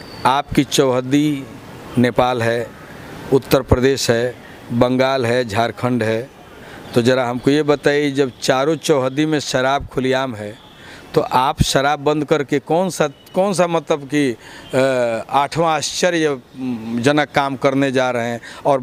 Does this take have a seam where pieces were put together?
no; 0 cuts

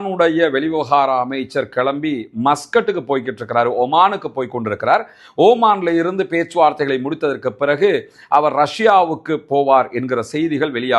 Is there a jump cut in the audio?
no; 0 cuts

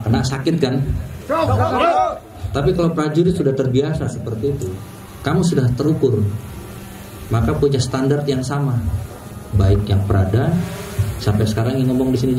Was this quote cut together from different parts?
no; 0 cuts

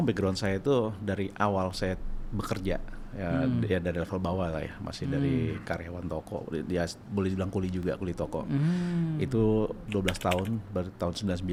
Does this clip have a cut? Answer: no; 0 cuts

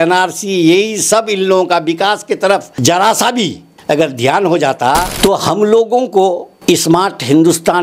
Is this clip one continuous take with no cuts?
no; 3 cuts; at 2.7 s, 3.7 s, 5.1 s

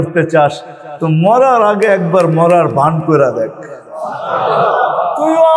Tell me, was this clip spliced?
no; 0 cuts

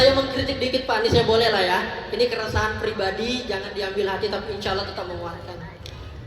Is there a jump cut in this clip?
no; 0 cuts

